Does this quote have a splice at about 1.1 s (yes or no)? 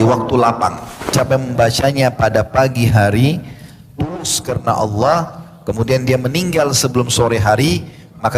yes